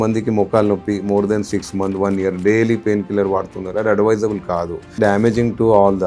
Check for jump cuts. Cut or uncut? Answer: cut